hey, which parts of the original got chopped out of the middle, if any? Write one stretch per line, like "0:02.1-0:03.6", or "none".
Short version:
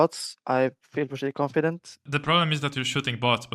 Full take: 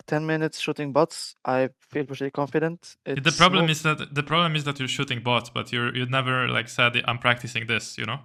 0:03.0-0:04.0